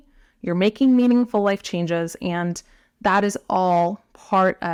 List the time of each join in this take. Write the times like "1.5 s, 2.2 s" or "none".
none